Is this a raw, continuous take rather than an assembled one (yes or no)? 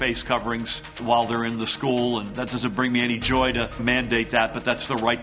no